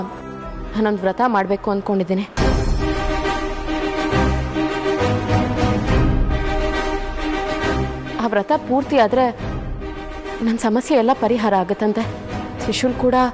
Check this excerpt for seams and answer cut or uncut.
uncut